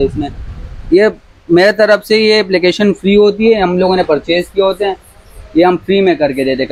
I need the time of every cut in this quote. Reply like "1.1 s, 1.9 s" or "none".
none